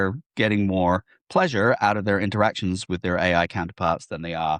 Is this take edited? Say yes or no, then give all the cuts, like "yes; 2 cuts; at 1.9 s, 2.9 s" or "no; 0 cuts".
no; 0 cuts